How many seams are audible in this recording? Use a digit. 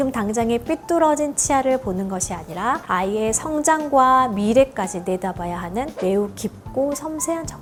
0